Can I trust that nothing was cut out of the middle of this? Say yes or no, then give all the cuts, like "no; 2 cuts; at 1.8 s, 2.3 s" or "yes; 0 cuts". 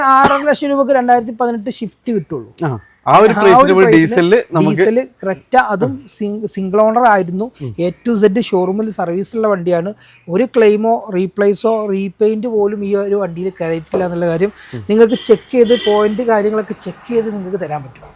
yes; 0 cuts